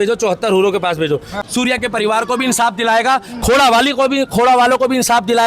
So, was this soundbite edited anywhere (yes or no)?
yes